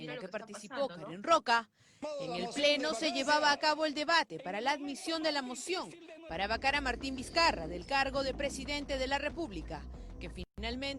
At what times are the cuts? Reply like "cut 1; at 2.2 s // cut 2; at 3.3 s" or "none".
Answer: cut 1; at 10.0 s

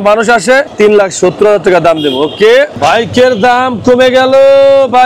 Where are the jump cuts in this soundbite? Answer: cut 1; at 2.8 s

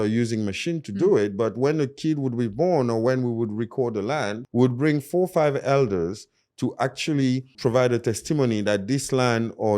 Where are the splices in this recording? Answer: cut 1; at 4.4 s // cut 2; at 7.5 s

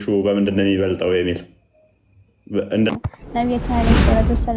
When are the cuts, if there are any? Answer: cut 1; at 2.9 s

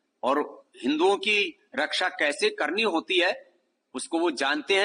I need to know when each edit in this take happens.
none

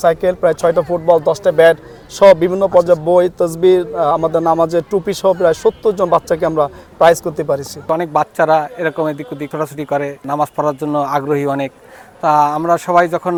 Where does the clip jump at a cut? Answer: none

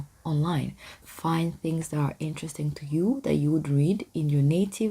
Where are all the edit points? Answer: cut 1; at 0.9 s

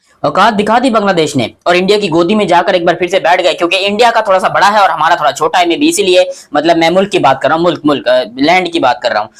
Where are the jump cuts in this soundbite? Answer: none

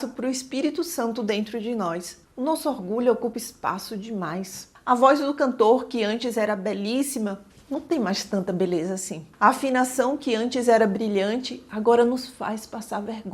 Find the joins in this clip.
cut 1; at 4.7 s

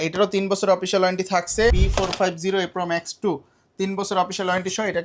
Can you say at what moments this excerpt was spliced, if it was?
cut 1; at 1.8 s

